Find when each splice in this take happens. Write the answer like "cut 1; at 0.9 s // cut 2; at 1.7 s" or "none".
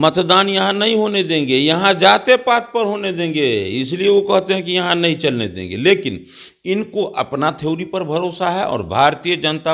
none